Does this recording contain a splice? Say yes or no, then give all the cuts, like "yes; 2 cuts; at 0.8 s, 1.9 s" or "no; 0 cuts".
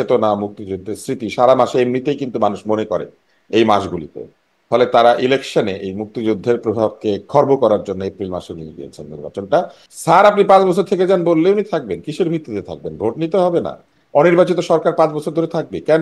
yes; 1 cut; at 9.8 s